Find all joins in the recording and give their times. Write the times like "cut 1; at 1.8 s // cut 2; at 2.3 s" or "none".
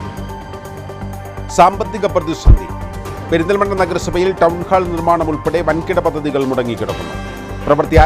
cut 1; at 1.3 s